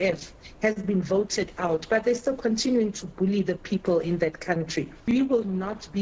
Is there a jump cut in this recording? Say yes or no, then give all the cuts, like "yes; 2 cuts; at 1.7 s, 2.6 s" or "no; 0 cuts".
yes; 1 cut; at 5.1 s